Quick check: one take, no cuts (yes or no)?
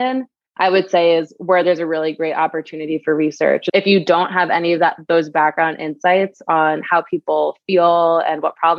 no